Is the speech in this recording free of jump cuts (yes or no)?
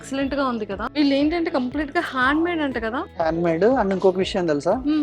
no